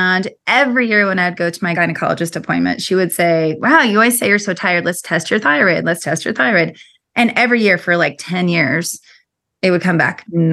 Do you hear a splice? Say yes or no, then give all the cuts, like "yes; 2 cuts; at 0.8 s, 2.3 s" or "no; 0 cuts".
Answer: yes; 1 cut; at 1.7 s